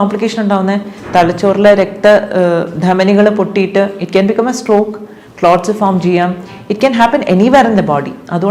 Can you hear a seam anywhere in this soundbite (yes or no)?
no